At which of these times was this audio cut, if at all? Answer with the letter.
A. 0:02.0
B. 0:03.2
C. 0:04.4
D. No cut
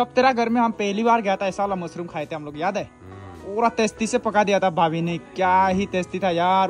D